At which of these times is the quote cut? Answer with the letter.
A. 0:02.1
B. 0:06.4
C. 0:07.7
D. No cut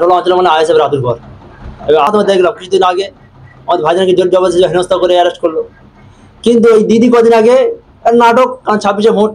A